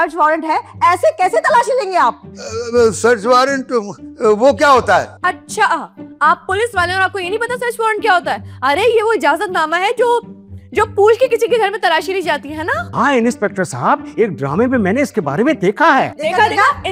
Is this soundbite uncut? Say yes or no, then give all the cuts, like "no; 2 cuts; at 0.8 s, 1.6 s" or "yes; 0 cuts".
yes; 0 cuts